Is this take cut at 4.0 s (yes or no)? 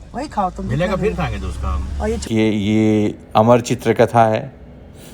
no